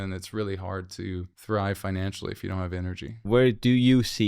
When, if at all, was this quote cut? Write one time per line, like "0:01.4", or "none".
0:01.3
0:03.2